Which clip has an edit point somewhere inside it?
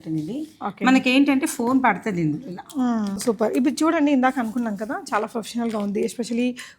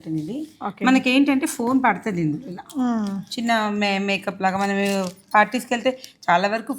first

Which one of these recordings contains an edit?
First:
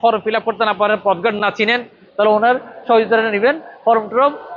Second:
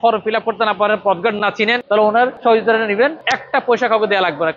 second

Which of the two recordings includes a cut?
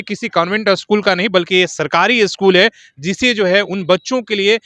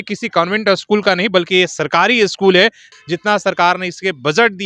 second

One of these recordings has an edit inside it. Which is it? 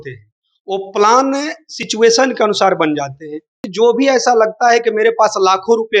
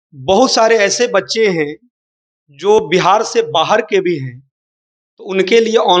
first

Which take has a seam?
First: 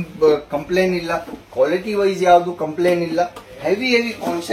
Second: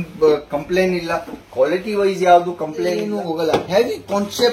second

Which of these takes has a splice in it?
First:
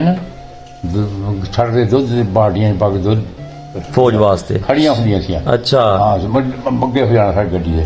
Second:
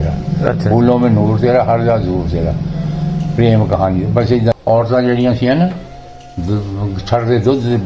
second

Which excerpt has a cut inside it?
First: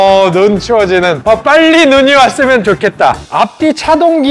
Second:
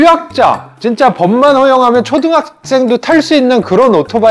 first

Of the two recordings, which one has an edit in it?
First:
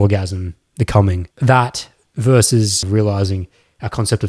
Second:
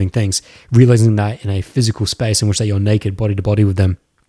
first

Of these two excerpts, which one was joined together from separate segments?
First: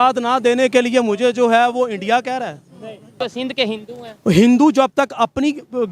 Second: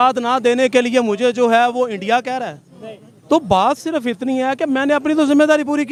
first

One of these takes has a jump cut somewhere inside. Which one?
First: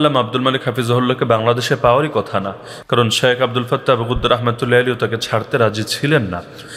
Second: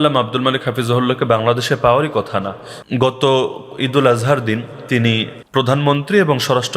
second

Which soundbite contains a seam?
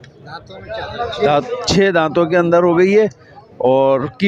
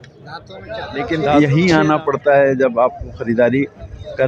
second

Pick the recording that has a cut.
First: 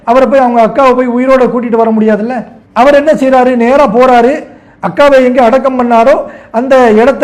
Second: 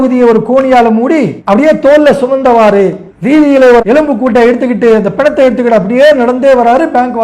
second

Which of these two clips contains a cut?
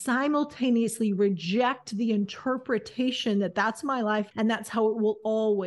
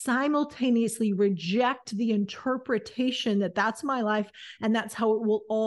first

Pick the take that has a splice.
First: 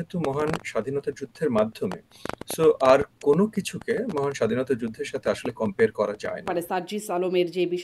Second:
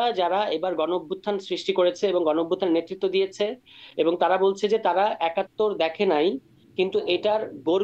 first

